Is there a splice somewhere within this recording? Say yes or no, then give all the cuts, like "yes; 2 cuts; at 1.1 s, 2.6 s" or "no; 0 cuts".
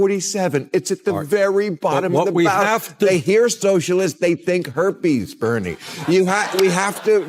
no; 0 cuts